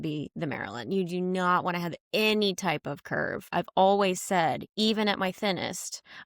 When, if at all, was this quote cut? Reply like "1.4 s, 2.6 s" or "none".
3.4 s